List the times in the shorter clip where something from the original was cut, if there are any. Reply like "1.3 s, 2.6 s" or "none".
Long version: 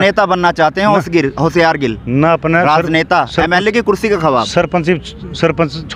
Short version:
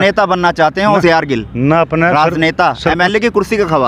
1.0 s